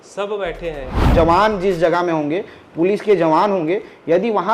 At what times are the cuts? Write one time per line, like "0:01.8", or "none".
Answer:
0:01.1